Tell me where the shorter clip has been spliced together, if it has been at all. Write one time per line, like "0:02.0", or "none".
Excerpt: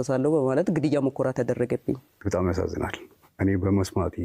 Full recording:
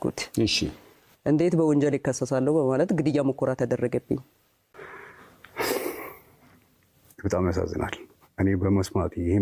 0:02.1